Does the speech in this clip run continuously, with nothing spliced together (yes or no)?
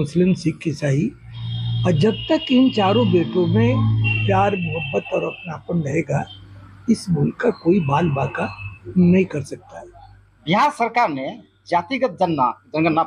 yes